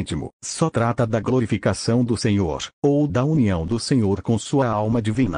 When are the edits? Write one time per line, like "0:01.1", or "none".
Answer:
0:02.5